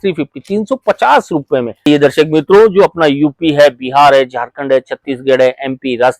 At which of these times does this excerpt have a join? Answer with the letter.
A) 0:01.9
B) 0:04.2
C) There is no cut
A